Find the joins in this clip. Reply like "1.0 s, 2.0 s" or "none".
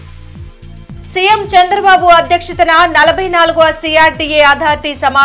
0.9 s